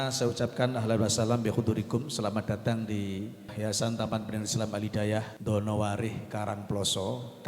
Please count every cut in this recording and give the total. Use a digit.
2